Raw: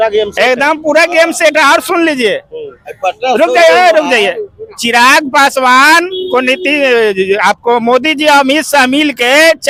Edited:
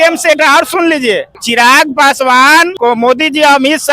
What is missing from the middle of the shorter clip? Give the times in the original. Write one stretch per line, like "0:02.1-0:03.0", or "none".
0:02.5-0:04.7
0:06.1-0:07.6